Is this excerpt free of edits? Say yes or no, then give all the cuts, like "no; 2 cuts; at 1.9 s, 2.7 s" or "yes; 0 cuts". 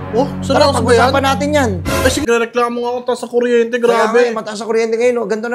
no; 1 cut; at 2.2 s